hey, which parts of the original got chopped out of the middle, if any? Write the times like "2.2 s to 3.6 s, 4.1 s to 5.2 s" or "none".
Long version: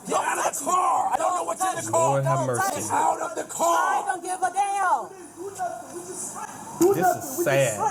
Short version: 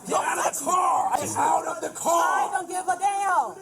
1.2 s to 2.7 s